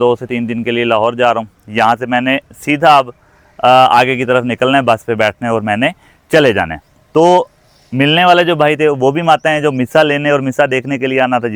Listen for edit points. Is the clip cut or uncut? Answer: uncut